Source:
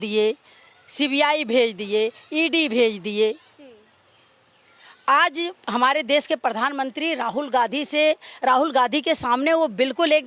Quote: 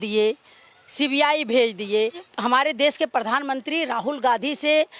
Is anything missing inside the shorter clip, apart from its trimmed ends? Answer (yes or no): yes